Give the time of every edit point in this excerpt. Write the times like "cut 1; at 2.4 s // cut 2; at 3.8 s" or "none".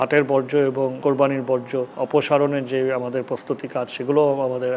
cut 1; at 1.0 s // cut 2; at 1.9 s

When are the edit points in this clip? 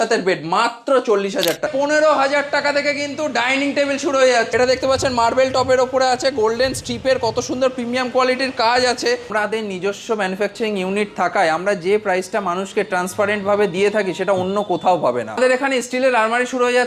cut 1; at 1.7 s // cut 2; at 4.5 s // cut 3; at 9.3 s // cut 4; at 15.3 s

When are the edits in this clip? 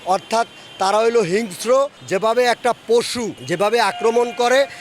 cut 1; at 2.0 s // cut 2; at 3.4 s

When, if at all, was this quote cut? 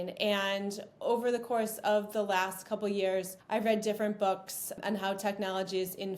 cut 1; at 3.4 s // cut 2; at 4.7 s

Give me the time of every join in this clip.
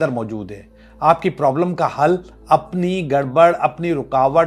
none

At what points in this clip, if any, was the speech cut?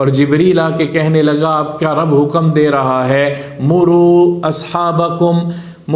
none

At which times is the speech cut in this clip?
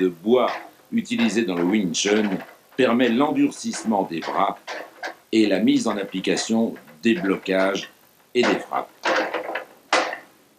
none

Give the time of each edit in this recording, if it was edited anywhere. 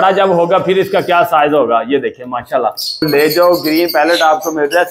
cut 1; at 3.1 s

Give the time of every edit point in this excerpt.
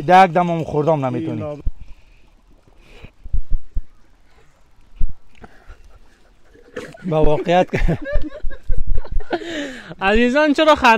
cut 1; at 1.6 s

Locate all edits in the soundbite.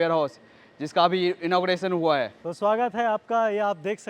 cut 1; at 2.4 s

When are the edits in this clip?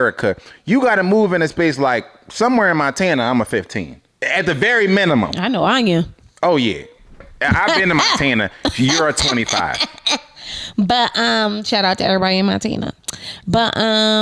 none

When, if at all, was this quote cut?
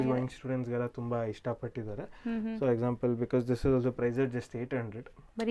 none

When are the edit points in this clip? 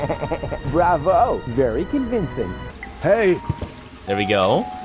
cut 1; at 2.7 s

